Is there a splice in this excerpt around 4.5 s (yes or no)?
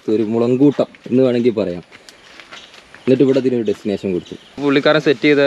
yes